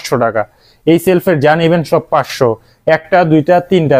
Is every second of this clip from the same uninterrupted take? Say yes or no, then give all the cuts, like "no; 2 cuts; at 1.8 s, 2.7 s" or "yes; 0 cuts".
yes; 0 cuts